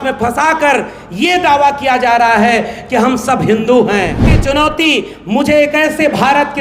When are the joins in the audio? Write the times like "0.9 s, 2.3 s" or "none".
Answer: 4.3 s